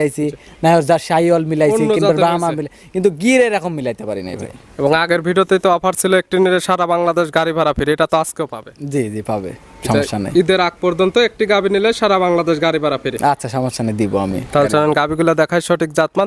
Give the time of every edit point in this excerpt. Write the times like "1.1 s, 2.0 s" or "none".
none